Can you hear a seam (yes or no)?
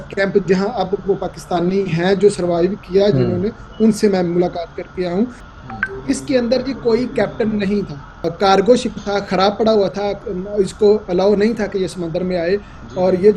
yes